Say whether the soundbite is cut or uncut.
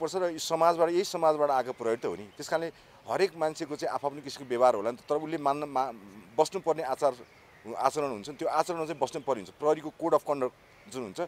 uncut